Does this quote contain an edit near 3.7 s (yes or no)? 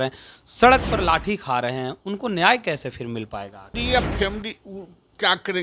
yes